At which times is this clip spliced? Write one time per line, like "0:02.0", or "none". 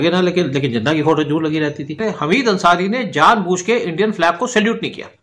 0:02.0